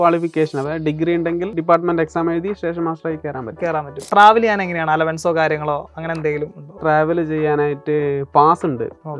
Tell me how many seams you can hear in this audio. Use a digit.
3